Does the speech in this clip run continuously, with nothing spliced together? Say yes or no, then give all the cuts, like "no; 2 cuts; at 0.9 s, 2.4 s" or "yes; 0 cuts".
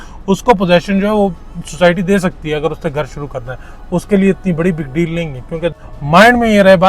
no; 1 cut; at 5.8 s